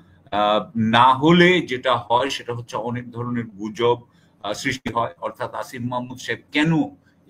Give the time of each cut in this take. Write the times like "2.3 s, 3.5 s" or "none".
none